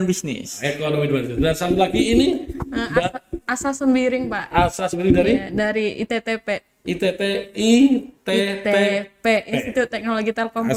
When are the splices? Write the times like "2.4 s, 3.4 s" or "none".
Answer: none